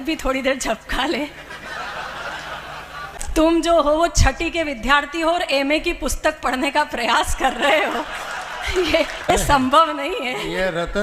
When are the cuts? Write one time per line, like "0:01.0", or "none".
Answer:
0:03.2
0:09.3